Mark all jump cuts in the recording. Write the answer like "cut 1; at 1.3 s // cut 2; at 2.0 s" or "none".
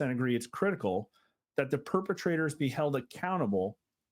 none